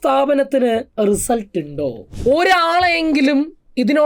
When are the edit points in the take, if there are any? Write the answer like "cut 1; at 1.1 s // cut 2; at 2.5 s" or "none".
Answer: cut 1; at 2.1 s